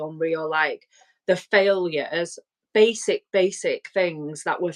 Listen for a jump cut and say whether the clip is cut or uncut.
uncut